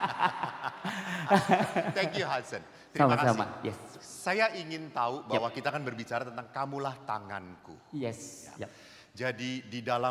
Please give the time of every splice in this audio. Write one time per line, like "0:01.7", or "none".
none